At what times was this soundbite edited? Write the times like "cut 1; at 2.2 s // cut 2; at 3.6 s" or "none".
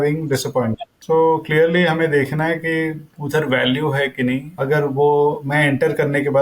cut 1; at 0.9 s // cut 2; at 3.1 s // cut 3; at 4.5 s